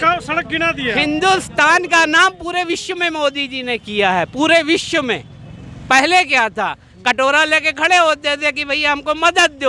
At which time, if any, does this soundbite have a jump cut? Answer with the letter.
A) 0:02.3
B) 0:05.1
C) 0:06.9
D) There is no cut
D